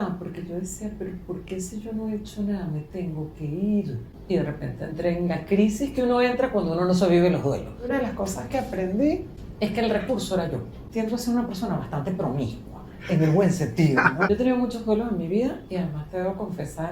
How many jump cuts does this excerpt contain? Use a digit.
5